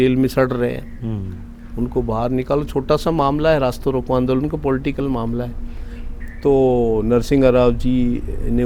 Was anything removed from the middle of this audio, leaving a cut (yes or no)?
no